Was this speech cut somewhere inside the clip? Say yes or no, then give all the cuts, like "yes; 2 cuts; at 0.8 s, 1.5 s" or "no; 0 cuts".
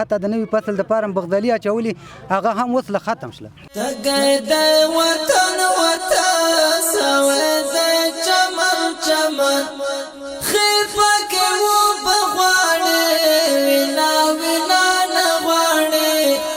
yes; 1 cut; at 3.6 s